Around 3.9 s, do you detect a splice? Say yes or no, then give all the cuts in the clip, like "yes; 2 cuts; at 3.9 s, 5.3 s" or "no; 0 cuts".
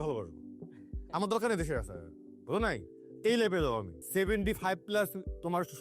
yes; 1 cut; at 3.9 s